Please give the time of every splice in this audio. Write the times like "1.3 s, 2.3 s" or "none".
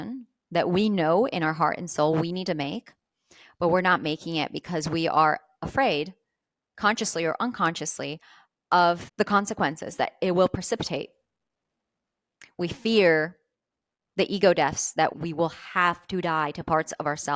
9.1 s, 15.1 s